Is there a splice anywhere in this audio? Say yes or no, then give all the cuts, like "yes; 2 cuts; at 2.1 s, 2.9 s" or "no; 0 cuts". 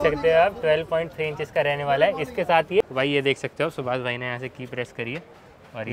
yes; 1 cut; at 2.8 s